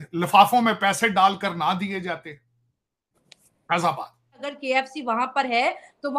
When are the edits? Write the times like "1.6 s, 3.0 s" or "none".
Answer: 4.5 s